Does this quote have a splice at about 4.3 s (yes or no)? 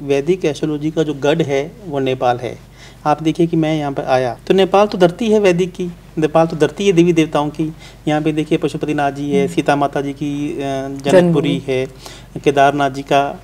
yes